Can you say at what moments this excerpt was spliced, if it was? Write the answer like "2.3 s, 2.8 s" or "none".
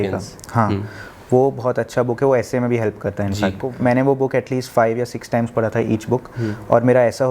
3.7 s